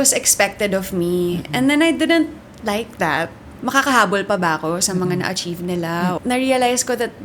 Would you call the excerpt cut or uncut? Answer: cut